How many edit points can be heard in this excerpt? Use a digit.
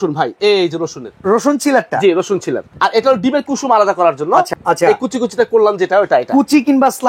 2